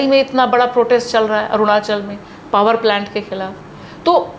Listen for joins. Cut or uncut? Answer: uncut